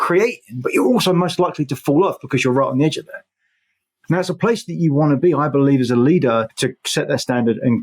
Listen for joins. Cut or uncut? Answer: cut